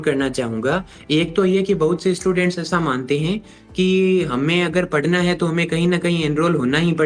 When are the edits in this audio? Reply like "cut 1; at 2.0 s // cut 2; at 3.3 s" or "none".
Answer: none